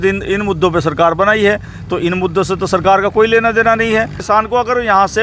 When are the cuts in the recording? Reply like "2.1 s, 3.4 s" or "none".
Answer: 4.2 s